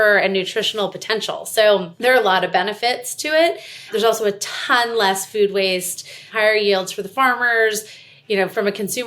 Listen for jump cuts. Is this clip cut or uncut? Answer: cut